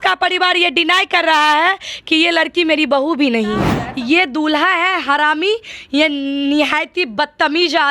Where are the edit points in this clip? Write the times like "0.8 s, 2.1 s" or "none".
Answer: 3.8 s